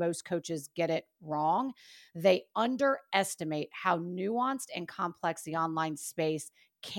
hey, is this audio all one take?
yes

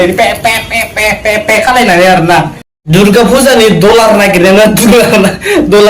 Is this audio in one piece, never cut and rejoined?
no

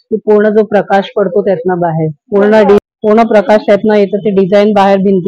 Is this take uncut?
no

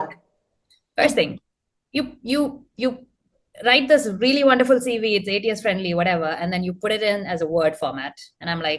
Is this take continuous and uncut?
yes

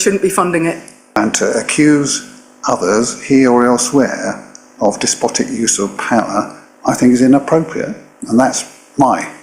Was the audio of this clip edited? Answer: yes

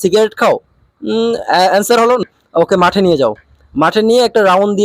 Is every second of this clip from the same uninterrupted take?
no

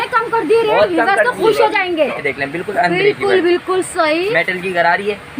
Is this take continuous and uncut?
no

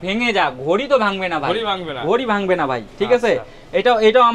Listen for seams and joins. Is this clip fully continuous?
yes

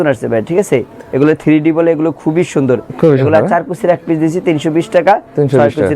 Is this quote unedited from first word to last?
yes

